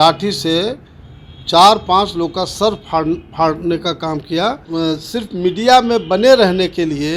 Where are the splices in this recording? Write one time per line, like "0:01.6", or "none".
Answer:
0:04.6